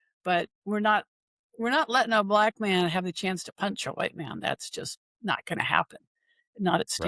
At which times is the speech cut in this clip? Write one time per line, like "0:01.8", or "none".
none